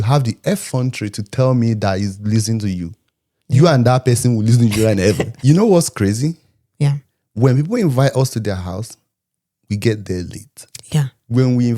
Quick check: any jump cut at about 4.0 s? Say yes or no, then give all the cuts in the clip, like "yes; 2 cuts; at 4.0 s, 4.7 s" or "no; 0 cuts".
no; 1 cut; at 5.3 s